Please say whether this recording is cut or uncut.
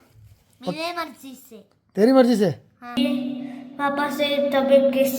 cut